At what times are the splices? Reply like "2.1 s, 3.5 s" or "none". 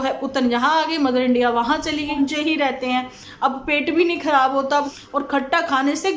2.1 s, 5.0 s